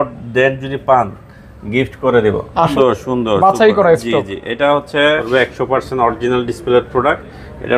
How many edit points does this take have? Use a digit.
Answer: 2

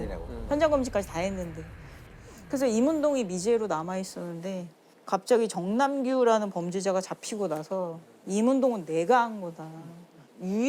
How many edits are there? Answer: 0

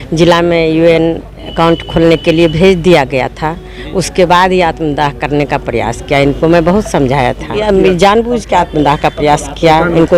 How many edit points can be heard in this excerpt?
1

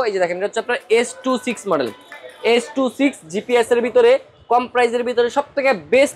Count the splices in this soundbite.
0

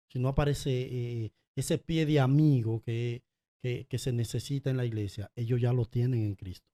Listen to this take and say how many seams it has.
0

